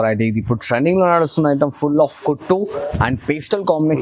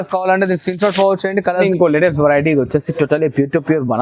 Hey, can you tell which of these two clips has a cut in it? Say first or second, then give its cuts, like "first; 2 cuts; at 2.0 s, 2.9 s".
second; 1 cut; at 1.7 s